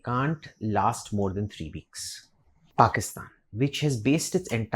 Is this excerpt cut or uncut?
cut